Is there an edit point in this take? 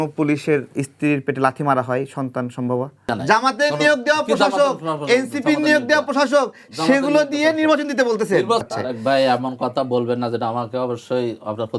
yes; 2 cuts; at 3.1 s, 8.6 s

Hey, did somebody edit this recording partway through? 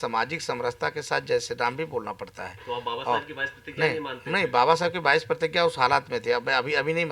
no; 0 cuts

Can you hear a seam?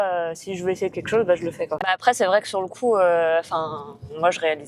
yes; 1 cut; at 2.0 s

